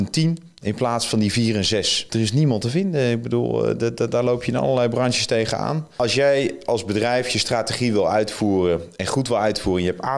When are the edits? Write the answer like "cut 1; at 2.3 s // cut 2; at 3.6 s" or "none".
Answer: cut 1; at 2.0 s // cut 2; at 5.9 s